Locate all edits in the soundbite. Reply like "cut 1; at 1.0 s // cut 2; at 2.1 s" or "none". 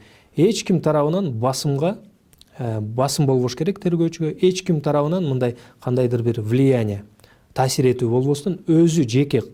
none